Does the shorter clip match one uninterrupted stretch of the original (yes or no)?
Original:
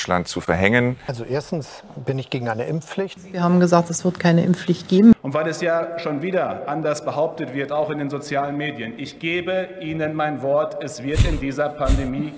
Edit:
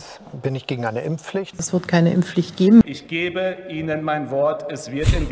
no